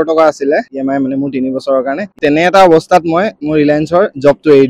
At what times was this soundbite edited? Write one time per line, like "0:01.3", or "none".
0:02.1
0:03.4